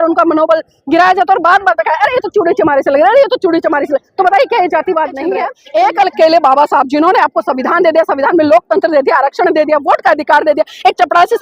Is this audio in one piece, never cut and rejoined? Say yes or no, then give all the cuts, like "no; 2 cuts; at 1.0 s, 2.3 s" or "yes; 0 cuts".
no; 1 cut; at 5.6 s